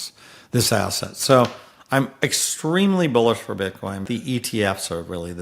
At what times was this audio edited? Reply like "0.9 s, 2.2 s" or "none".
4.0 s